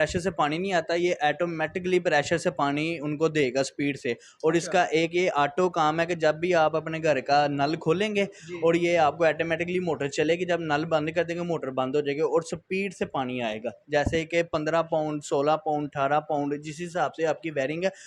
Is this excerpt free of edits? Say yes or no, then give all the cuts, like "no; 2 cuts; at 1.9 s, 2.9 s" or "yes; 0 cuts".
yes; 0 cuts